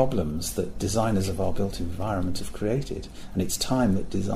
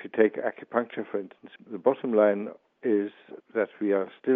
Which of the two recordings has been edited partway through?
second; 1 cut; at 1.6 s

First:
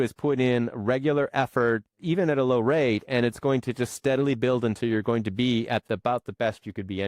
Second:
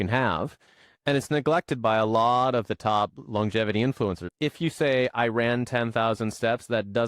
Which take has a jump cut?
second; 1 cut; at 4.2 s

